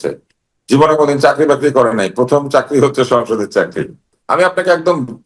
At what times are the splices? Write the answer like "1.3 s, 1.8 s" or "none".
4.1 s